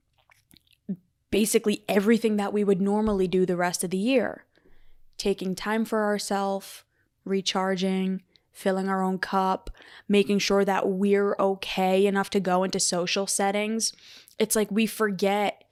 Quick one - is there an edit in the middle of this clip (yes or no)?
no